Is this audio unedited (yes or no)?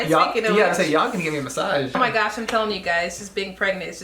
no